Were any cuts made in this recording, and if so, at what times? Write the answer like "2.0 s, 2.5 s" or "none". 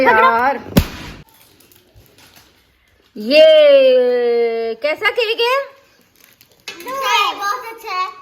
1.2 s